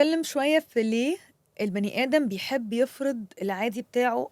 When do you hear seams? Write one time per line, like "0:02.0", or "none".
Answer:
none